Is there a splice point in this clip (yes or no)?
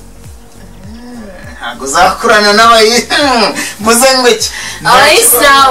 no